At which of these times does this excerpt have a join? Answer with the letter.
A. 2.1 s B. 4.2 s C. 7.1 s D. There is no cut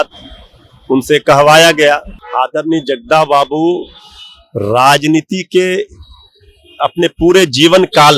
A